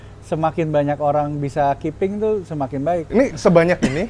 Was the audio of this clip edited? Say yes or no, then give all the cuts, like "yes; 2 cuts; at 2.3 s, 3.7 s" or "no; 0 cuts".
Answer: yes; 1 cut; at 3.0 s